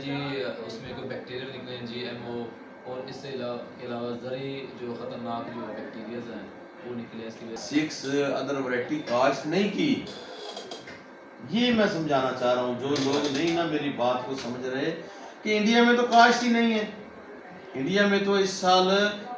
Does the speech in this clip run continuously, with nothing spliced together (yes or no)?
no